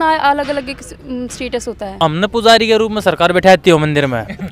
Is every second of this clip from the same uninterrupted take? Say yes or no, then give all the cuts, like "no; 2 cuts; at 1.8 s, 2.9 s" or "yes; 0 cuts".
no; 1 cut; at 1.9 s